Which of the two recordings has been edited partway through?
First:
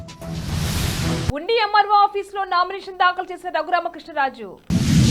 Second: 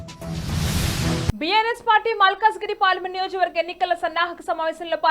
second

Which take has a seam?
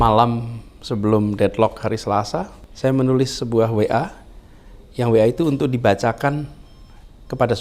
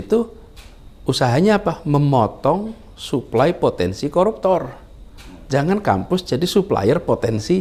first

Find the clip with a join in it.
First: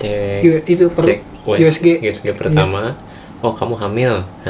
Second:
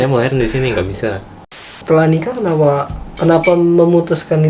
second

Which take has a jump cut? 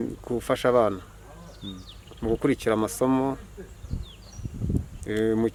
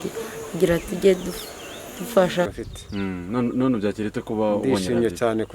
second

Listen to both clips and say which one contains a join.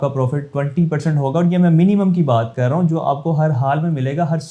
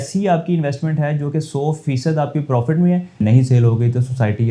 second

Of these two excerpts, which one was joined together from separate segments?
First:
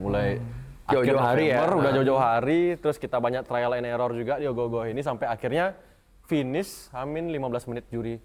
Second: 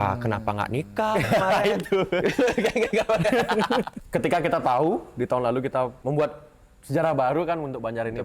second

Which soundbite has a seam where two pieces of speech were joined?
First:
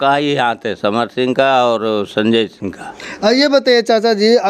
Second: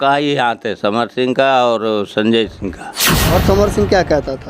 second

